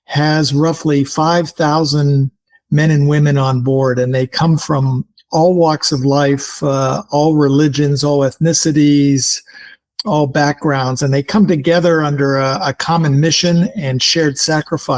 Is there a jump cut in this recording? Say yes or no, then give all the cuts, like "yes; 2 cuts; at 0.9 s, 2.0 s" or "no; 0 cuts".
no; 0 cuts